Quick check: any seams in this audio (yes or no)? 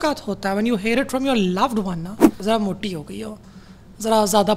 yes